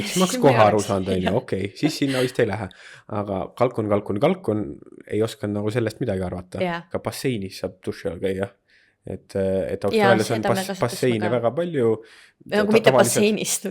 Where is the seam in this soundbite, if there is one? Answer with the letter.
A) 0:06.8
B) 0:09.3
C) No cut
A